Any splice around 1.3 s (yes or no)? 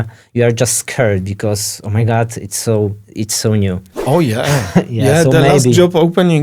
no